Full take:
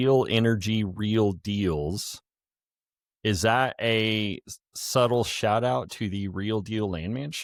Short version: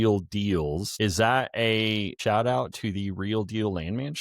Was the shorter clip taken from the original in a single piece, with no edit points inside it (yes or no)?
no